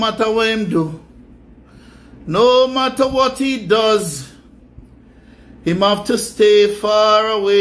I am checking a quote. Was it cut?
no; 0 cuts

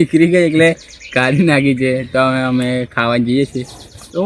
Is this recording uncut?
yes; 0 cuts

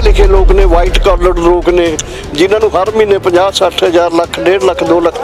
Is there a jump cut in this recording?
no; 0 cuts

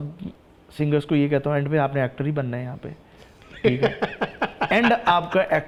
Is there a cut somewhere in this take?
no; 0 cuts

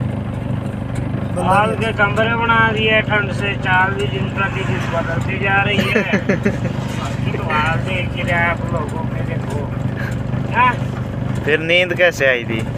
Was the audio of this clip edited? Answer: no; 0 cuts

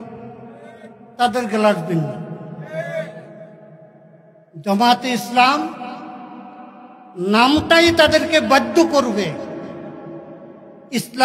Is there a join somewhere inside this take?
no; 0 cuts

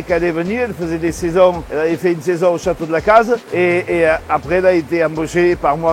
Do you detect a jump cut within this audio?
no; 0 cuts

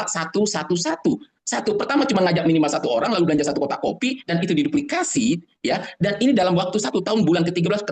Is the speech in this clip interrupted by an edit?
no; 0 cuts

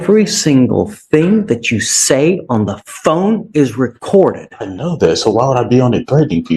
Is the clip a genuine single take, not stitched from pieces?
yes; 0 cuts

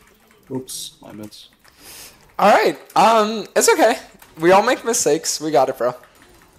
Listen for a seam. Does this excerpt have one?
no; 0 cuts

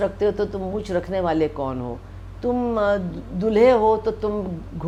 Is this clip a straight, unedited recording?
yes; 0 cuts

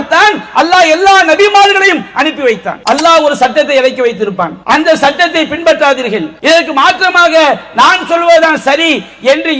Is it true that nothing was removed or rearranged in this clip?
no; 3 cuts; at 2.7 s, 4.6 s, 6.3 s

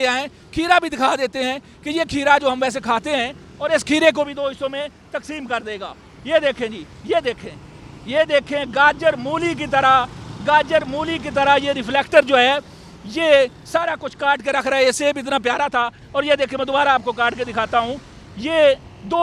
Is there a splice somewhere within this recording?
no; 0 cuts

